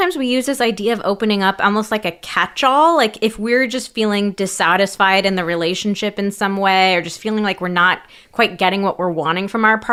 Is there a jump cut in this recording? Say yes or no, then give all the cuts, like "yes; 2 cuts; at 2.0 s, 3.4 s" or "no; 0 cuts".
no; 0 cuts